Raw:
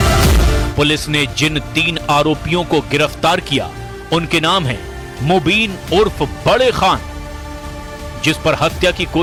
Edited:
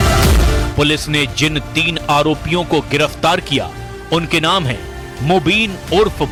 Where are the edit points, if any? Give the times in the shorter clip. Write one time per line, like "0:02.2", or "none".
none